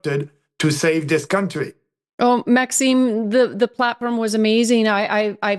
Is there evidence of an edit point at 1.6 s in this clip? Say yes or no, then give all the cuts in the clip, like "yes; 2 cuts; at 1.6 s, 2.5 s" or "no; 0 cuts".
no; 0 cuts